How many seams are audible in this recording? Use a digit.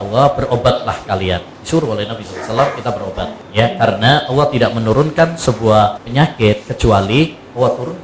3